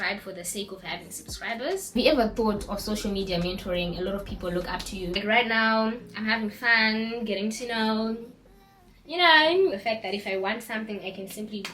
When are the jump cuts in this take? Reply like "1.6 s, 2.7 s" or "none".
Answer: 1.9 s, 5.2 s, 9.8 s